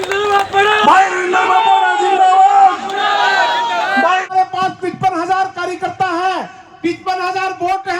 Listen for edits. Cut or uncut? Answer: cut